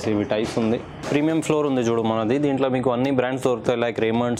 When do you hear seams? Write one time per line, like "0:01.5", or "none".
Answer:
0:01.0